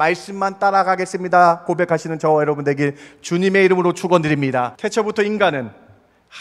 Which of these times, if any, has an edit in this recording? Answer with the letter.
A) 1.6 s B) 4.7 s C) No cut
B